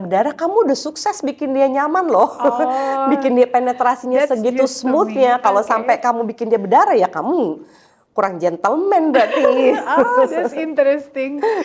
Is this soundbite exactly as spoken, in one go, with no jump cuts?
yes; 0 cuts

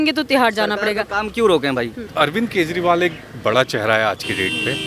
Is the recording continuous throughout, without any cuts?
no; 1 cut; at 2.0 s

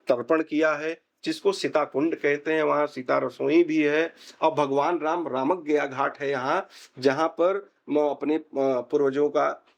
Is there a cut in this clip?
no; 0 cuts

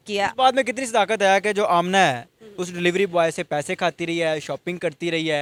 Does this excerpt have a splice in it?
no; 0 cuts

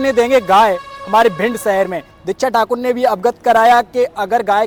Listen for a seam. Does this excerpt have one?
no; 0 cuts

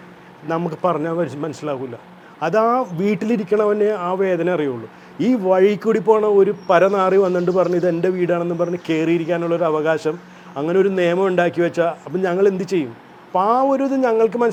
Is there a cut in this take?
no; 0 cuts

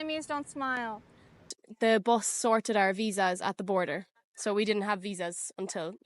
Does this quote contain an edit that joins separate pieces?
yes; 1 cut; at 1.4 s

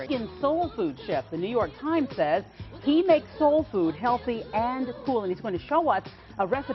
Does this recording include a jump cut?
yes; 1 cut; at 4.4 s

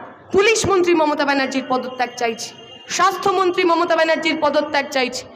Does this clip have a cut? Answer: no; 0 cuts

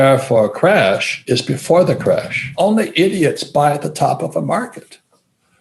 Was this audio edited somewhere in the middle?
yes; 2 cuts; at 1.1 s, 2.5 s

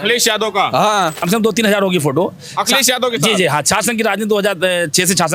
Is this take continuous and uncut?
no; 1 cut; at 1.2 s

